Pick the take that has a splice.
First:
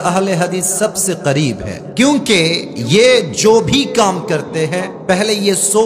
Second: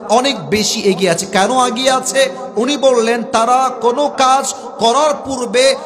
first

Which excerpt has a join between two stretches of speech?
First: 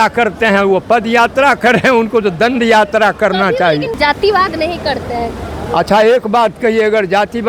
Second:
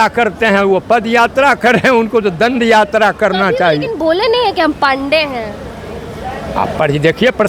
first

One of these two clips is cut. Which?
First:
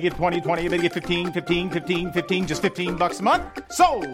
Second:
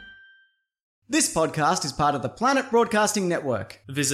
second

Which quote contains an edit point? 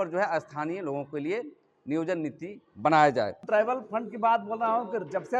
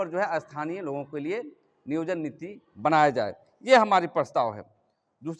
first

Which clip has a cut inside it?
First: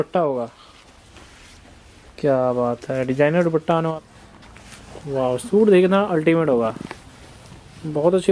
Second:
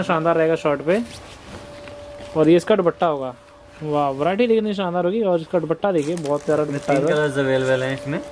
first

